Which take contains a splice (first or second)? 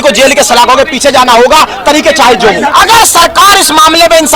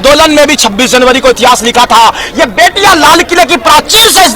first